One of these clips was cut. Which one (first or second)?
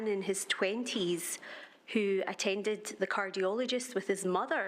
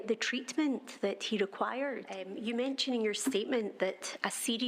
second